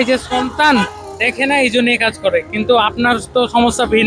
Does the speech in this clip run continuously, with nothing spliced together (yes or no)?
yes